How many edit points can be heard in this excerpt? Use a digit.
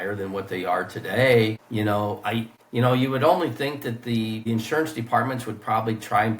3